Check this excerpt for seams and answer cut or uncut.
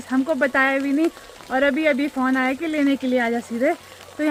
uncut